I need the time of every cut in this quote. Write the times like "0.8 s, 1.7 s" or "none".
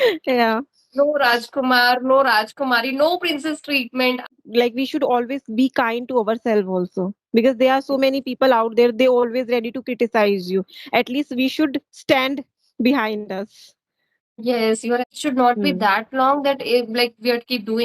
4.2 s, 15.1 s